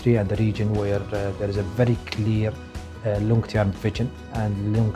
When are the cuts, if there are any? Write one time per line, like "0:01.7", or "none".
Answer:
none